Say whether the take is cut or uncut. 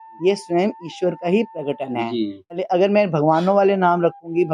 cut